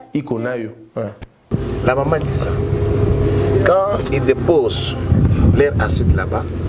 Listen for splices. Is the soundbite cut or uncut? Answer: cut